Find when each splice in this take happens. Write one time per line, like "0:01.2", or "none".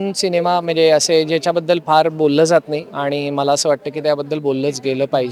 none